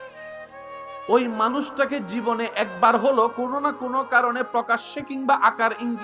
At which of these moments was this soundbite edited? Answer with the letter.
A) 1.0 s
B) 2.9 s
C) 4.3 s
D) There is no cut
A